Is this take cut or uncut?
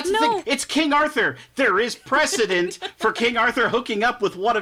uncut